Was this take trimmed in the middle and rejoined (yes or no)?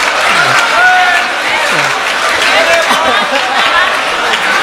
no